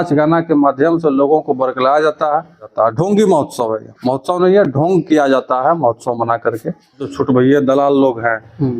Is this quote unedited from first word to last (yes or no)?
no